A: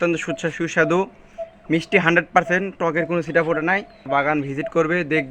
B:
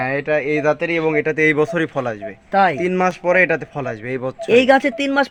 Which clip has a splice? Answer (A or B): A